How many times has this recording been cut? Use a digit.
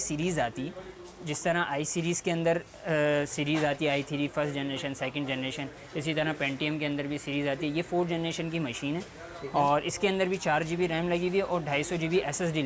0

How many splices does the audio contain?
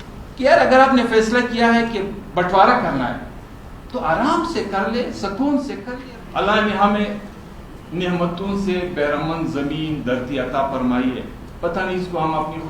1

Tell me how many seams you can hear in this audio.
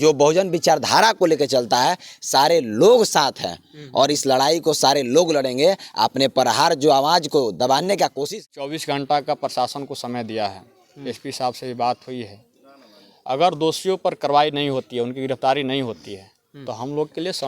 1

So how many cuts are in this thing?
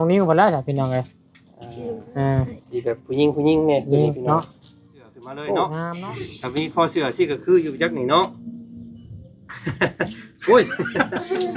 1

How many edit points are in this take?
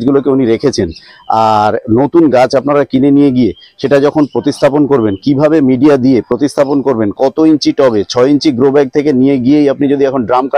0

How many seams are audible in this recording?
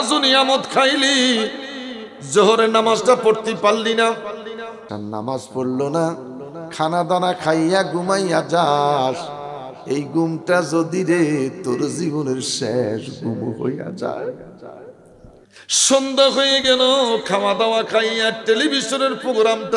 2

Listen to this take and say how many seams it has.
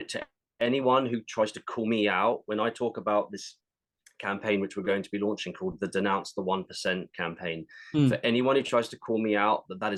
0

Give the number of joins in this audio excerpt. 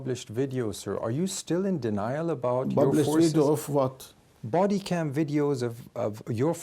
0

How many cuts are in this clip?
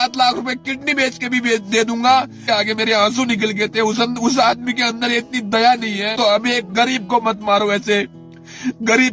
2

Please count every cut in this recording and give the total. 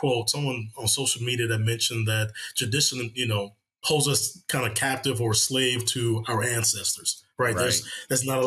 1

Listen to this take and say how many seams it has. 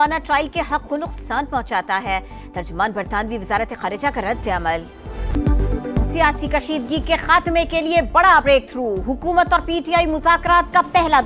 1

